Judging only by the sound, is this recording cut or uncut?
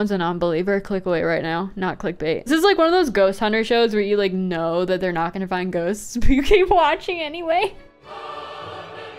cut